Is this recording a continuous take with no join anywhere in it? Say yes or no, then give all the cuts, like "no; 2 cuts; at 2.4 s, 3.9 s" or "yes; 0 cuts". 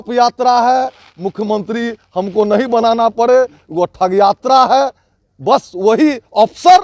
yes; 0 cuts